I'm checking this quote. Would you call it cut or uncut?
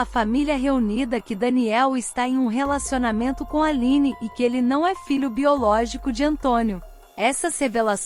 uncut